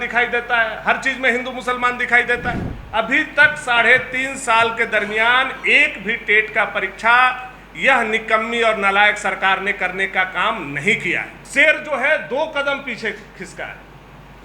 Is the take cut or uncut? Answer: cut